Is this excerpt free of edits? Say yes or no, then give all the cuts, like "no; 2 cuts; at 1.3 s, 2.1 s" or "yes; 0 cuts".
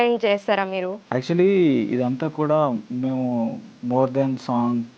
no; 2 cuts; at 1.0 s, 3.7 s